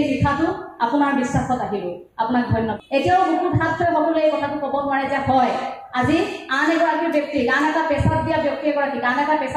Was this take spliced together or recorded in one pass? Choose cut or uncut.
cut